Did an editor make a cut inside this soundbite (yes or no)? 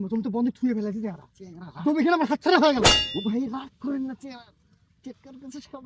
no